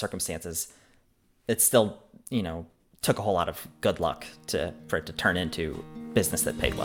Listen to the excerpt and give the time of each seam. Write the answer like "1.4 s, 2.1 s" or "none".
5.8 s